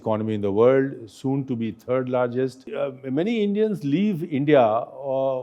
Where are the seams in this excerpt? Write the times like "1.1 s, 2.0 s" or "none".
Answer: 2.7 s